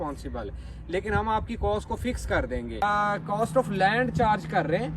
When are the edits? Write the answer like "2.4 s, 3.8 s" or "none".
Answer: 2.8 s